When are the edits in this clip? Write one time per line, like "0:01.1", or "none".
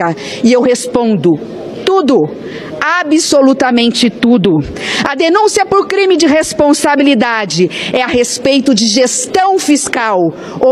none